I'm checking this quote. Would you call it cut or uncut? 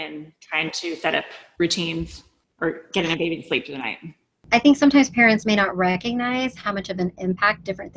cut